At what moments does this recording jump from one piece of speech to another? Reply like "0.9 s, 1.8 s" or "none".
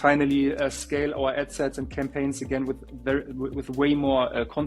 none

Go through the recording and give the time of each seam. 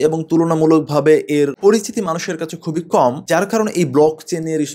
none

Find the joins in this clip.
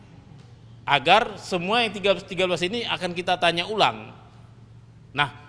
none

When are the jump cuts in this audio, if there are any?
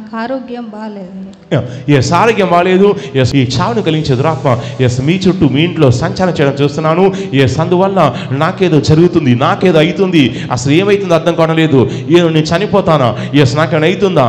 3.3 s

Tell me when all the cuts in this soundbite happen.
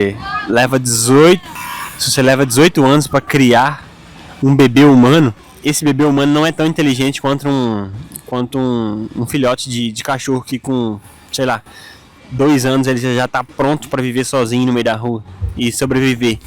1.6 s, 5.5 s

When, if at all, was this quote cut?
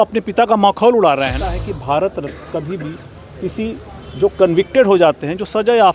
1.7 s

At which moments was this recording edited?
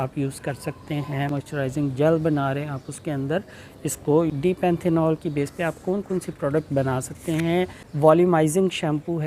1.3 s, 4.3 s, 7.8 s

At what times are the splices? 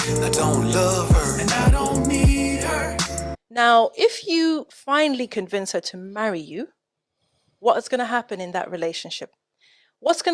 3.2 s

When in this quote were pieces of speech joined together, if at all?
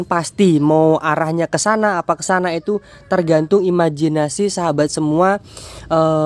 none

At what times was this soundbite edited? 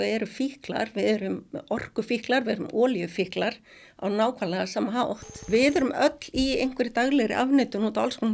5.4 s

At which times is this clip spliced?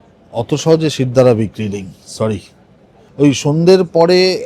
3.0 s

